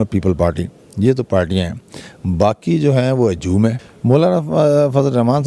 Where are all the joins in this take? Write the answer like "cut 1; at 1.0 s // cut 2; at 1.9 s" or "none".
cut 1; at 3.9 s